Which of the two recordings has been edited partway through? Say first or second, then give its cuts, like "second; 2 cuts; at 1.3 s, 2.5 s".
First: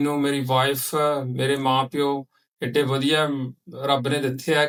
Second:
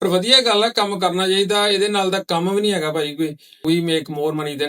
second; 1 cut; at 3.6 s